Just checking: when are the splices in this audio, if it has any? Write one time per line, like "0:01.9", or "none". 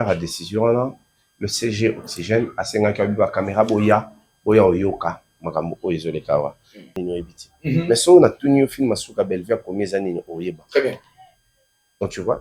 0:07.0